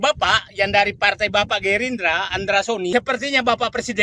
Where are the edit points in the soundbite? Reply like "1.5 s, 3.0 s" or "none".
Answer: 2.9 s